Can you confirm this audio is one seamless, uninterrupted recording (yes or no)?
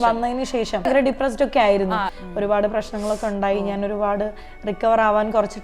no